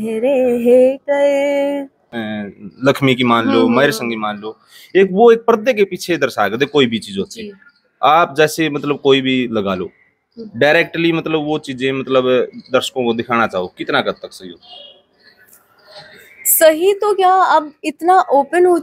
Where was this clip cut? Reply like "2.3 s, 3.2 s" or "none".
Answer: 2.0 s